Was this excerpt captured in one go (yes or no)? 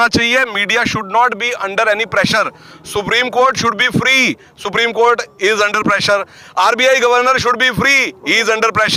yes